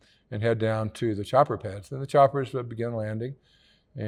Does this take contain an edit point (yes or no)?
no